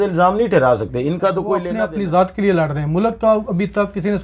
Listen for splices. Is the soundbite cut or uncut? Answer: cut